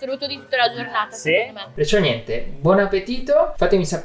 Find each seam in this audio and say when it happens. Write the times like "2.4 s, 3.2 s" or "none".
1.7 s